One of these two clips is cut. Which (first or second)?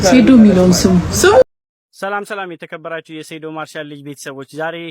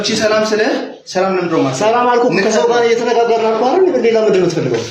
first